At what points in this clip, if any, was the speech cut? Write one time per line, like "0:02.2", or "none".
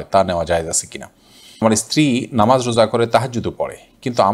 0:01.6